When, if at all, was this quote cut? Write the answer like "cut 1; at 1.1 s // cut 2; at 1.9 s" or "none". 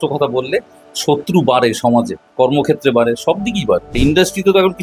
cut 1; at 2.2 s // cut 2; at 3.9 s